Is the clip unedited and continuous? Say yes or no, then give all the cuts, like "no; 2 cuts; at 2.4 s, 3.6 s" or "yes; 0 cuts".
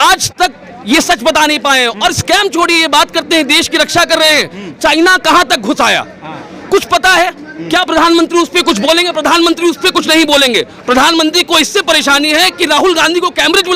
yes; 0 cuts